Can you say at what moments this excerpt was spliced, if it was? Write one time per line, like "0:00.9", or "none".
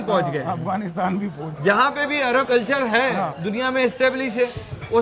0:01.6